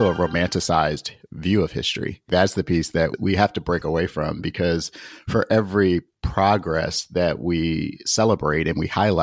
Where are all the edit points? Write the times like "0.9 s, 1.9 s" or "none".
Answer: 2.3 s